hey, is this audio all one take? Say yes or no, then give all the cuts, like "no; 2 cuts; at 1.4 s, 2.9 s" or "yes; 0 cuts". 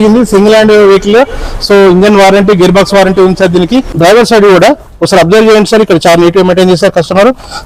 no; 1 cut; at 3.9 s